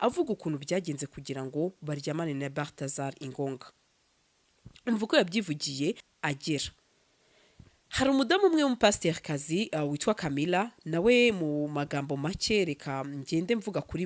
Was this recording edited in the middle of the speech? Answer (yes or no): yes